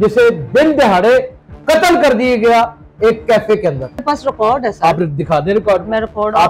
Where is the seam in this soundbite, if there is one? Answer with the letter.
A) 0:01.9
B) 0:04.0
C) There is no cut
B